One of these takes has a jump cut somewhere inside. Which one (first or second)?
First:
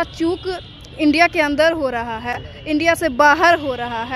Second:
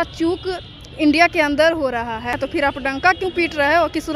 second